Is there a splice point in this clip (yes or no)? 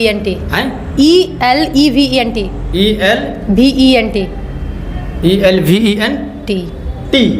no